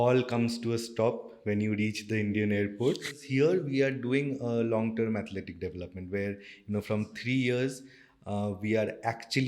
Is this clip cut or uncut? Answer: cut